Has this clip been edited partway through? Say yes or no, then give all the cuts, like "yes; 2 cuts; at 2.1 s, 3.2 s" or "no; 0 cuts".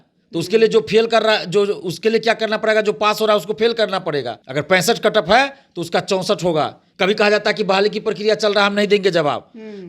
yes; 2 cuts; at 4.4 s, 6.8 s